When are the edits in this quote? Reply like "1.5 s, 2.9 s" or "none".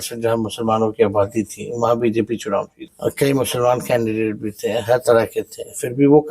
2.9 s